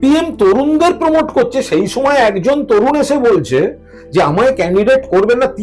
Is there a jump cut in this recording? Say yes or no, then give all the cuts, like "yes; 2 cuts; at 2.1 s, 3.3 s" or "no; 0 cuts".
no; 0 cuts